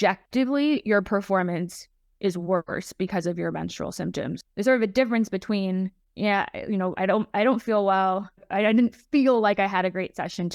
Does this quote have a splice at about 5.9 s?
no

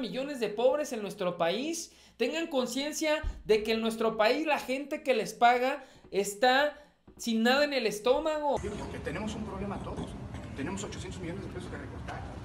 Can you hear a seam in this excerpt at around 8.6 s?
yes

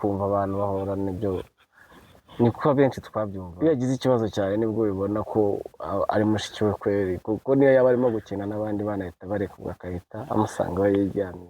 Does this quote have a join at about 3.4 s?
yes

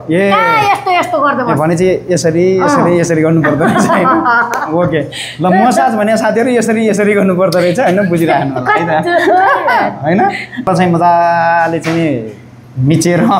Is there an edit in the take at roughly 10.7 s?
yes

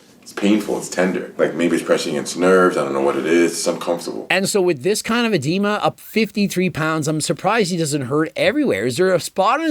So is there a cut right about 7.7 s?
no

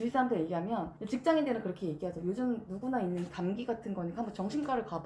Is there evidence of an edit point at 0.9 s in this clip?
yes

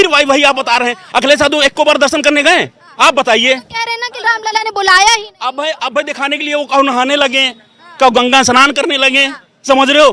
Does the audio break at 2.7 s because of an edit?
no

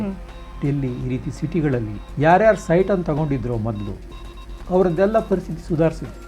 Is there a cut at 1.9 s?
yes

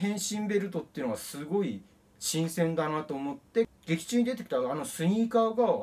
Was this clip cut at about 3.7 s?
yes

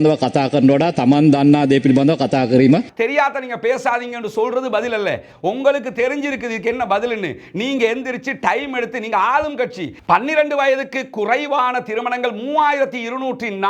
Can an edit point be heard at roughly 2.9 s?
yes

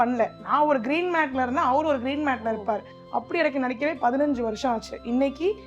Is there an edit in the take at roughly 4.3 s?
no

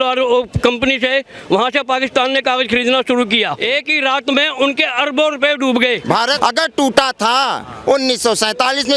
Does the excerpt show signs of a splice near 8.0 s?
no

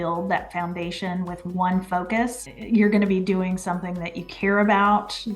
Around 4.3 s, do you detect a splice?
no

